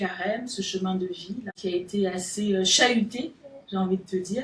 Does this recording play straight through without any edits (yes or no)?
no